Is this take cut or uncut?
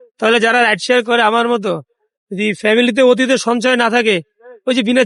uncut